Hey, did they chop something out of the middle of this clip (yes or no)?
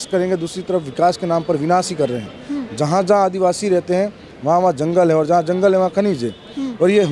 no